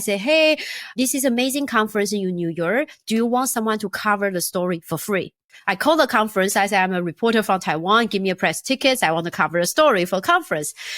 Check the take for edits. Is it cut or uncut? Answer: cut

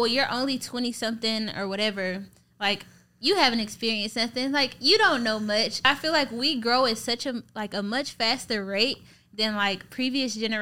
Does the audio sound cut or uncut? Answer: cut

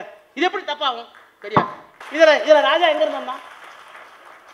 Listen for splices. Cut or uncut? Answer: cut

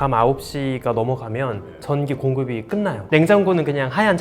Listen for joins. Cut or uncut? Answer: cut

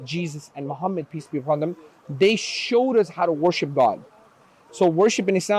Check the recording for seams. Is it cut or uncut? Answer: uncut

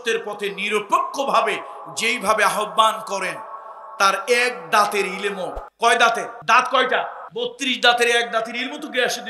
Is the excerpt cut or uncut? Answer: cut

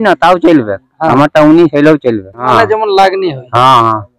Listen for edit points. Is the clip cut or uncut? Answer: cut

